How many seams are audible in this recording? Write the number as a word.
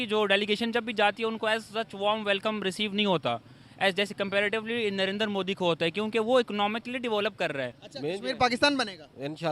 one